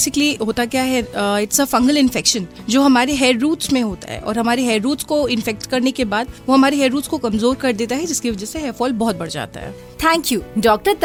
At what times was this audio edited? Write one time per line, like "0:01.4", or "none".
none